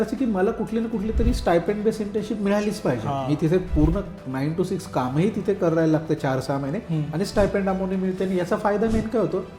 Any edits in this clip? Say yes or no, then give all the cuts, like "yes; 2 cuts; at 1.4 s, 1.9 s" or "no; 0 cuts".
no; 0 cuts